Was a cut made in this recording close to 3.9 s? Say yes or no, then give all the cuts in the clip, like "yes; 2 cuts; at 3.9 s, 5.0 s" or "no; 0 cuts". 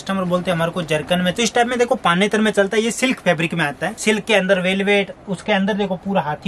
yes; 2 cuts; at 1.3 s, 3.9 s